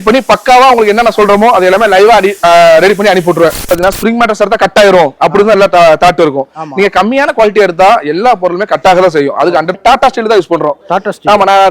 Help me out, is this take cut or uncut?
cut